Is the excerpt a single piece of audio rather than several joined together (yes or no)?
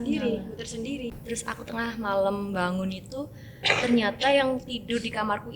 no